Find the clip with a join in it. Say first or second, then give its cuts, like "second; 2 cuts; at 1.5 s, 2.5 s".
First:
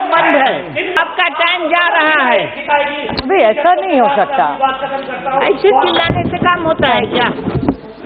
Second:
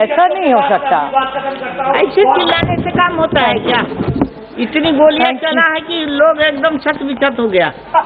first; 1 cut; at 1.0 s